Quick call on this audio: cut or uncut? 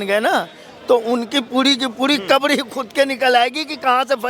uncut